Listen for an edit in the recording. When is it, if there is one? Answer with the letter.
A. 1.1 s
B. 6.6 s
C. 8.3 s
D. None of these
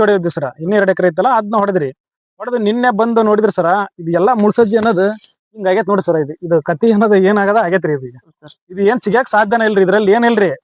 D